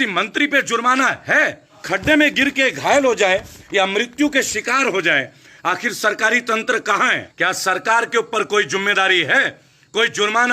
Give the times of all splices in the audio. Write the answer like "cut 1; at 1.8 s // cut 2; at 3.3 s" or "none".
cut 1; at 1.8 s // cut 2; at 7.3 s